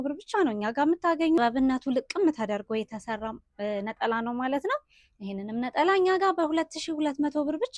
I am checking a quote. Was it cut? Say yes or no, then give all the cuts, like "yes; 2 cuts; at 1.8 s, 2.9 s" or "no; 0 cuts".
yes; 1 cut; at 1.4 s